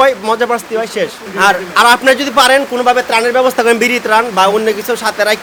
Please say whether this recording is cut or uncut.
uncut